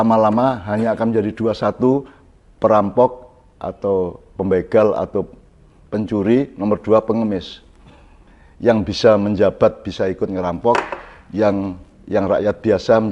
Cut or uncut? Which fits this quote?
uncut